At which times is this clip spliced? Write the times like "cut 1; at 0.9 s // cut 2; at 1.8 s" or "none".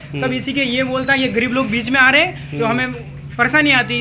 none